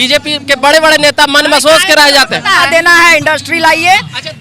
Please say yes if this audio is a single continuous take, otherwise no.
no